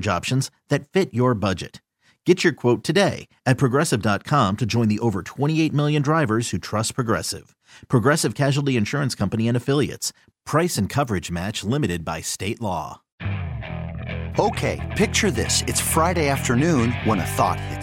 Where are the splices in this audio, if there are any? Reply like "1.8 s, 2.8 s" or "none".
13.1 s